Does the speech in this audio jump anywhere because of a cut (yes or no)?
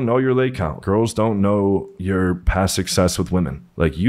no